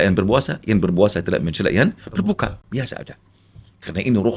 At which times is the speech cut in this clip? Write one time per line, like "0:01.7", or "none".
none